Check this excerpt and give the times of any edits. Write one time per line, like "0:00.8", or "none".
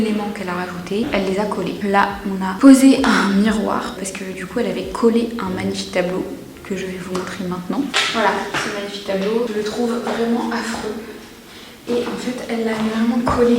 none